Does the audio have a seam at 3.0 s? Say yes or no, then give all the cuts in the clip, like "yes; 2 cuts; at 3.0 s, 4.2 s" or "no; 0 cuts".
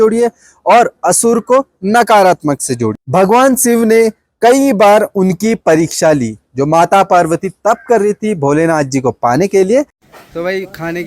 yes; 2 cuts; at 3.0 s, 10.0 s